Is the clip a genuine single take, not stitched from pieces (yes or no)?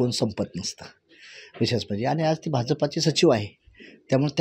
yes